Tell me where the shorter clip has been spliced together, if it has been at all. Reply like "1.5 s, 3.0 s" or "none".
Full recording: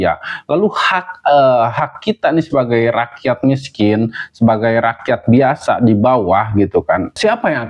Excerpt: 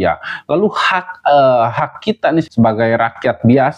2.5 s